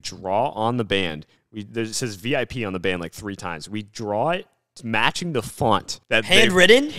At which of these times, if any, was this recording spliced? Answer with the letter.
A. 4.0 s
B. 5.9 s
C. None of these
B